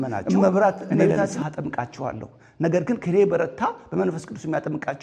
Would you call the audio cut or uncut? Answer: cut